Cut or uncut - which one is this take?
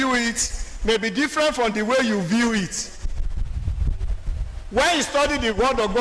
uncut